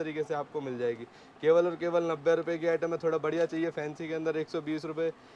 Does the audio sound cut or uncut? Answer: uncut